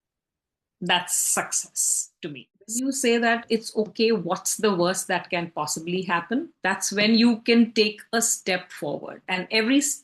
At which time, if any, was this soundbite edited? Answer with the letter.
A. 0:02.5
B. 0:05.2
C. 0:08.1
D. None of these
A